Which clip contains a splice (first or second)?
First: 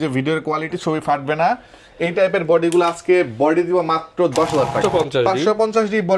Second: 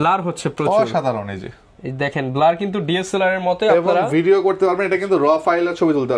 first